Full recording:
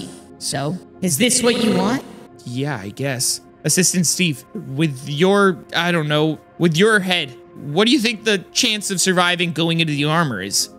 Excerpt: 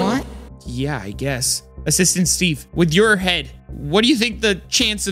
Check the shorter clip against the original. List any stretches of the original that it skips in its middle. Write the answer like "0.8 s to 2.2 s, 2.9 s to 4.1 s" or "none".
4.4 s to 6.5 s